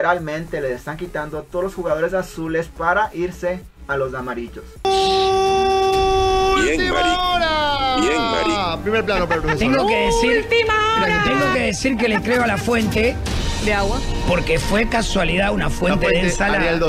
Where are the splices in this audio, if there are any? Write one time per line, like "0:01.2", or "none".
0:04.8